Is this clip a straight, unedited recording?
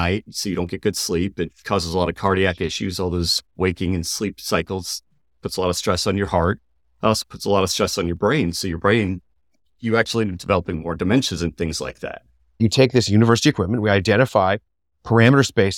no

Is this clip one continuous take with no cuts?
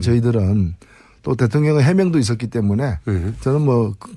no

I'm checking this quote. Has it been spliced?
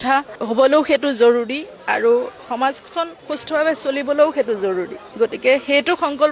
no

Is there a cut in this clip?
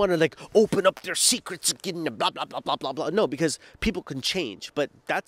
no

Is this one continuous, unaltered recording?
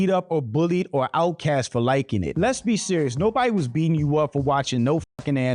no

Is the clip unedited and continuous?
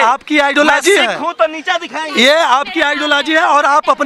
yes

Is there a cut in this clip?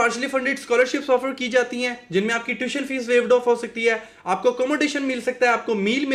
no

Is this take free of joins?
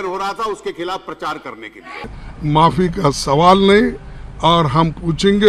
no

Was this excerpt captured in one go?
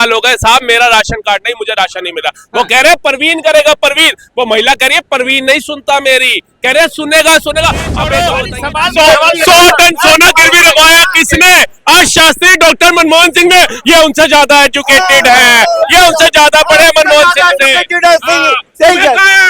no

